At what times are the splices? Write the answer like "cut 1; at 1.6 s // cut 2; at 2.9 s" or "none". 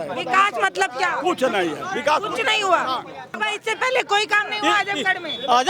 cut 1; at 3.4 s